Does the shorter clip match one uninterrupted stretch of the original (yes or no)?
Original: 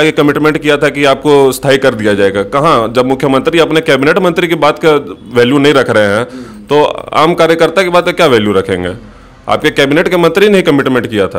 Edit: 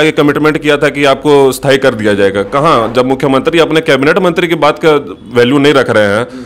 yes